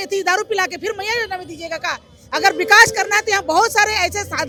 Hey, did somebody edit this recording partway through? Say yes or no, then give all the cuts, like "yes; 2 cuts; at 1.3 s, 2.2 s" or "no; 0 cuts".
no; 0 cuts